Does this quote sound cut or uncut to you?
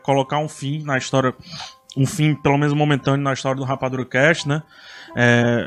uncut